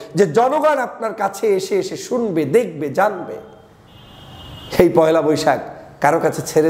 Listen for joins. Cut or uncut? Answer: uncut